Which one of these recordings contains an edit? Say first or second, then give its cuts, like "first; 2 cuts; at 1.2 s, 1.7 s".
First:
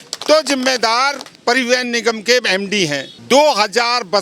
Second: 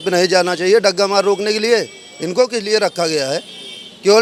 first; 2 cuts; at 1.2 s, 3.1 s